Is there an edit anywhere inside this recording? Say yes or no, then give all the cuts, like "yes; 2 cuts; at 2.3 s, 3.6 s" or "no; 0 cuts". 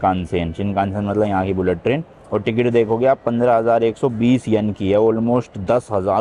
no; 0 cuts